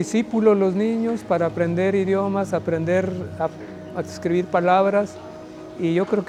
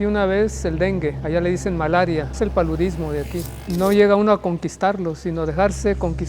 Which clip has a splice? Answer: second; 3 cuts; at 1.2 s, 2.3 s, 3.6 s

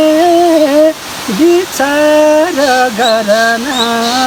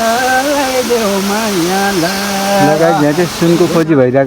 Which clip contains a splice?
second; 1 cut; at 2.6 s

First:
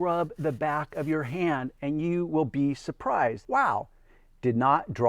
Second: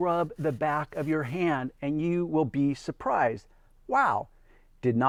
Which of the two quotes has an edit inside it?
first; 1 cut; at 3.4 s

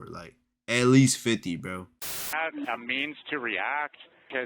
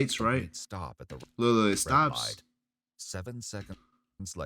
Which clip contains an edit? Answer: first; 1 cut; at 2.4 s

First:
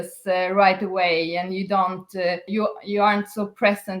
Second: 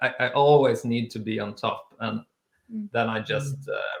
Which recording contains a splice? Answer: first; 1 cut; at 2.5 s

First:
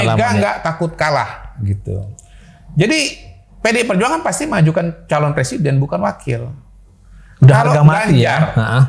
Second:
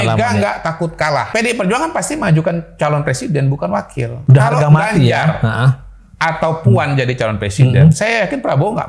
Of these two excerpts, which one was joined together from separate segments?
second; 2 cuts; at 1.3 s, 4.1 s

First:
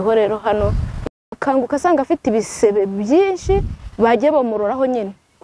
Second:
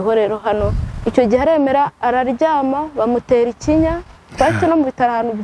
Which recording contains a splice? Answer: first; 1 cut; at 1.0 s

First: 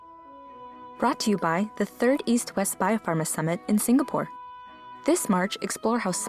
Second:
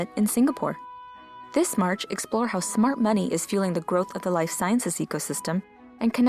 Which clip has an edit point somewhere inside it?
first; 1 cut; at 1.0 s

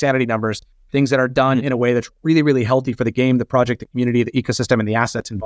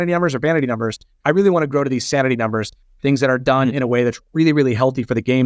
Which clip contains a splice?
second; 1 cut; at 1.1 s

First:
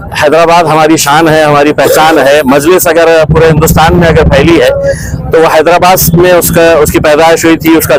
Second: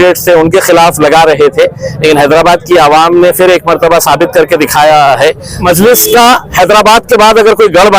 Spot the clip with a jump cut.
second; 1 cut; at 5.6 s

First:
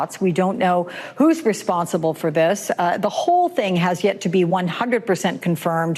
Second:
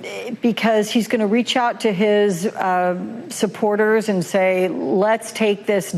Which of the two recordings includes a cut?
first; 1 cut; at 4.3 s

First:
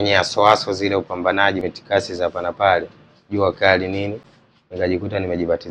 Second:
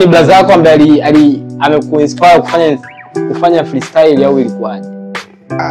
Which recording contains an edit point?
first; 1 cut; at 1.6 s

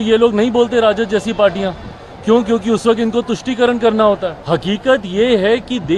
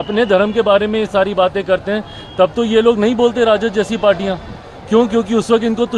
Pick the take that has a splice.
first; 1 cut; at 4.4 s

